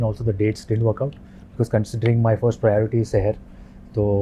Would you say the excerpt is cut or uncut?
uncut